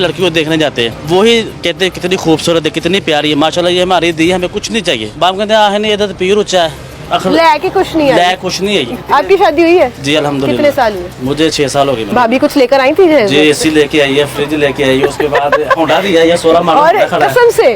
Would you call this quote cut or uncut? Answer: cut